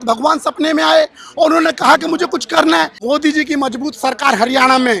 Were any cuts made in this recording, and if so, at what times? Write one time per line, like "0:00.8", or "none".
0:02.9